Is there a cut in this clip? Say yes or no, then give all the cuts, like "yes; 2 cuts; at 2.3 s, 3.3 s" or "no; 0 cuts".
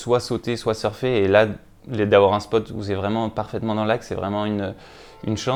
no; 0 cuts